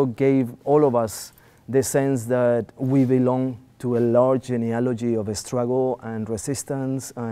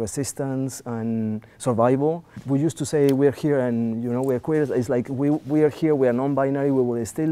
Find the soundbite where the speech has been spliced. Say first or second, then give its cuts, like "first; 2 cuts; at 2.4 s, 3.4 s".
second; 1 cut; at 2.3 s